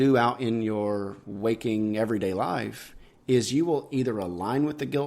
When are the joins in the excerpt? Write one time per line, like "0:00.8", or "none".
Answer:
none